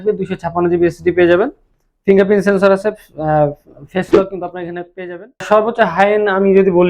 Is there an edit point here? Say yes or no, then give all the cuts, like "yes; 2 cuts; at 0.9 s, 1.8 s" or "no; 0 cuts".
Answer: yes; 1 cut; at 5.4 s